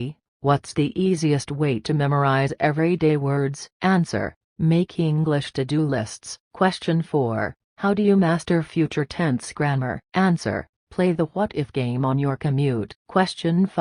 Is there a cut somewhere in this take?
yes; 2 cuts; at 6.4 s, 13.0 s

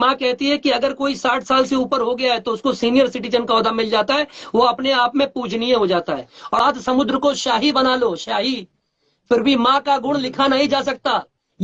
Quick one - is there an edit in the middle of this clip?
yes; 1 cut; at 6.6 s

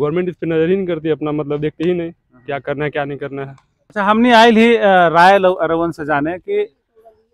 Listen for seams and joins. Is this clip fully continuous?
no; 1 cut; at 3.8 s

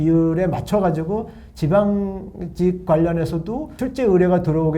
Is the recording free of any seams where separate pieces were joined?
no; 1 cut; at 3.7 s

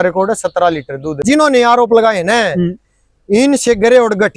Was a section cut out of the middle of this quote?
yes; 1 cut; at 1.2 s

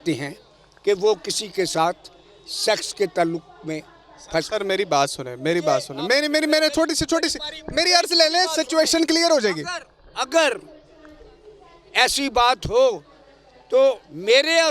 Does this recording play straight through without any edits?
yes; 0 cuts

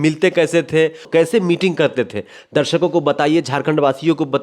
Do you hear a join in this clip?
yes; 1 cut; at 1.0 s

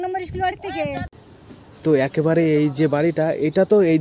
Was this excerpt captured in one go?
no; 1 cut; at 1.1 s

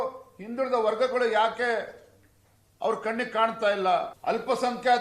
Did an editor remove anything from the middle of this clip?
yes; 1 cut; at 4.1 s

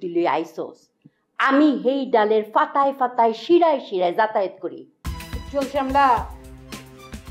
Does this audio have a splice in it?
yes; 1 cut; at 5.1 s

